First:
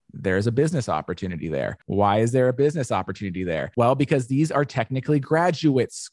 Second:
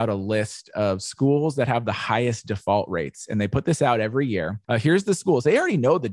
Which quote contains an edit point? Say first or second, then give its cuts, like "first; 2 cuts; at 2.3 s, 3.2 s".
first; 2 cuts; at 1.8 s, 3.6 s